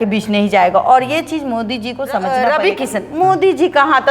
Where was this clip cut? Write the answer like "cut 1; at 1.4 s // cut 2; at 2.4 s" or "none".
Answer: cut 1; at 2.3 s